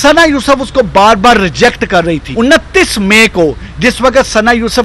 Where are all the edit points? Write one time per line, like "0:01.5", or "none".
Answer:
0:02.2